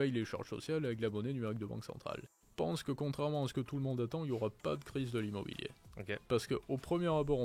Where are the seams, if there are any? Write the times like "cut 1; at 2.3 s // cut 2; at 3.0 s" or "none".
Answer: cut 1; at 2.3 s